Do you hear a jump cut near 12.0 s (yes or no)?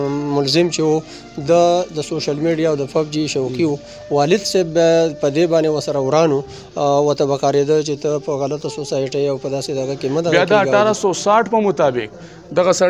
no